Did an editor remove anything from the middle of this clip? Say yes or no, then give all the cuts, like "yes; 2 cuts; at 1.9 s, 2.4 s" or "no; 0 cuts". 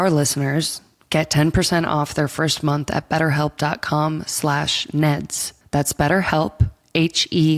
no; 0 cuts